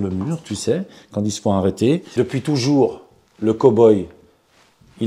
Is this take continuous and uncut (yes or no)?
no